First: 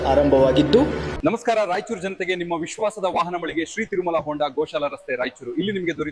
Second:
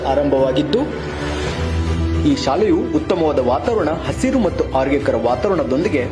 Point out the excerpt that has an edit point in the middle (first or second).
first